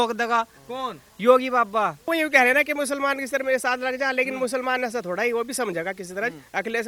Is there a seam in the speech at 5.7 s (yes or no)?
no